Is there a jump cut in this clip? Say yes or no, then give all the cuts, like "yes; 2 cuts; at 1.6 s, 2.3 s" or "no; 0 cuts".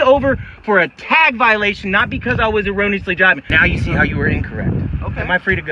yes; 1 cut; at 3.5 s